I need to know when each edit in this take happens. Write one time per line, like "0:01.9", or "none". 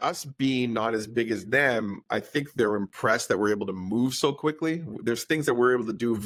none